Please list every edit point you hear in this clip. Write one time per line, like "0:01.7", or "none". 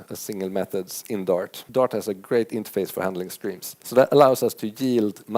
0:01.6
0:03.7